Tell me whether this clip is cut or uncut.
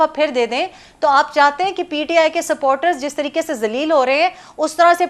uncut